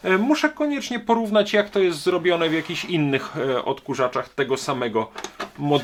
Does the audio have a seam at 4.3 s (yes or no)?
no